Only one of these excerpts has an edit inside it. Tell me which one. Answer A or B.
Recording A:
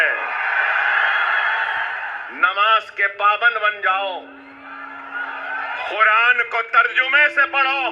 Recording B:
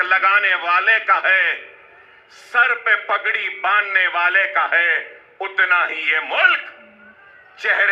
A